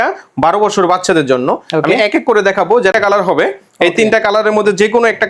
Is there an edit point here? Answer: yes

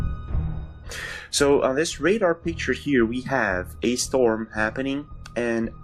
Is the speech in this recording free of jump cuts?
yes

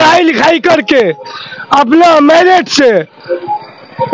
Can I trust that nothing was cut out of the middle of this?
yes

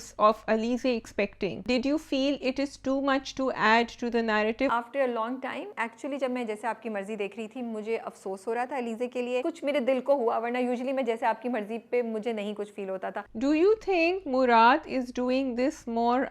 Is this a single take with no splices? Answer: no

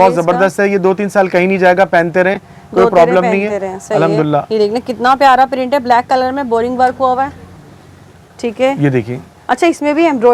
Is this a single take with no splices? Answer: yes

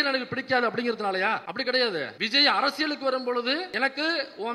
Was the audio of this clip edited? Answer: yes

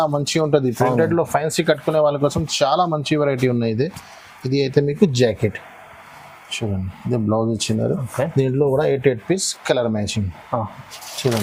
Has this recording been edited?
no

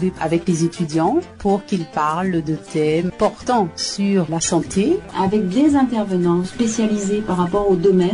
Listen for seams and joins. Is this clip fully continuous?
no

